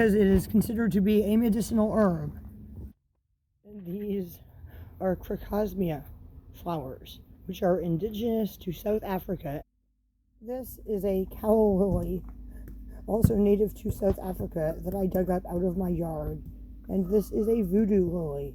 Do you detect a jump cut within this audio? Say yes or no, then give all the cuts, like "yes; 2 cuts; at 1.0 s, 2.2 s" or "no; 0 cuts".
yes; 2 cuts; at 2.9 s, 9.6 s